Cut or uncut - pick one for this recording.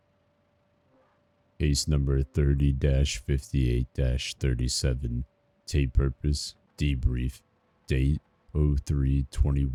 uncut